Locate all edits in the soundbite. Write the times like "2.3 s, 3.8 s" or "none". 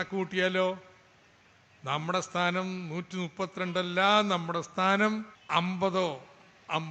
5.3 s